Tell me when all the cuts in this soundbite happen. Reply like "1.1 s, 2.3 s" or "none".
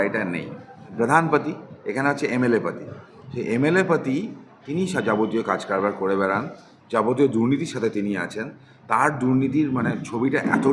0.9 s

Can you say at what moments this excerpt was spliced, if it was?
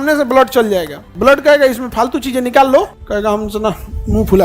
1.0 s, 3.0 s

